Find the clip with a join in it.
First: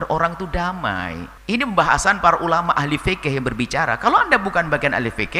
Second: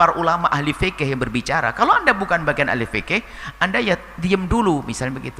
first; 1 cut; at 1.3 s

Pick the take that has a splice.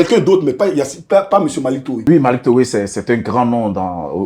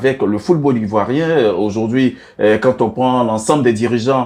first; 1 cut; at 1.9 s

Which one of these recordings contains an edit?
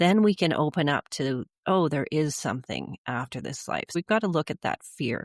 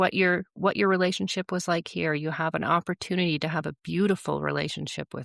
first; 1 cut; at 4.0 s

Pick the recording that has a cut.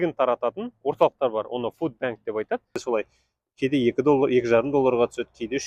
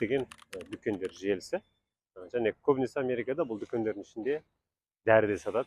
first; 1 cut; at 2.8 s

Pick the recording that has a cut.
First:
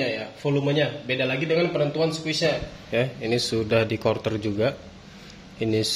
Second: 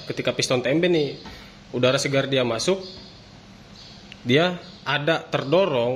first; 1 cut; at 2.7 s

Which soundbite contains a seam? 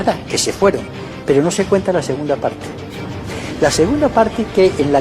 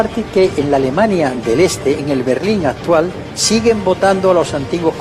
first; 1 cut; at 1.0 s

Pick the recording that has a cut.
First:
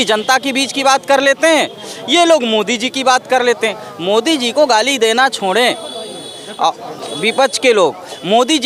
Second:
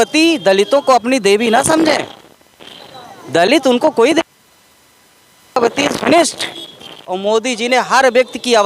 second; 1 cut; at 7.1 s

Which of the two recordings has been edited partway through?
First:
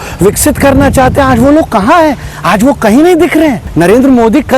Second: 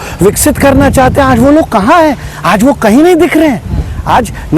first; 1 cut; at 3.6 s

